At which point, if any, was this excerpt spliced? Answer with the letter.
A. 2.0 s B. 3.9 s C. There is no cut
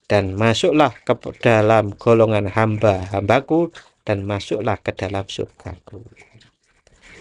C